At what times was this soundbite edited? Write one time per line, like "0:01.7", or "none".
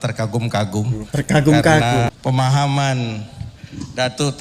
0:02.1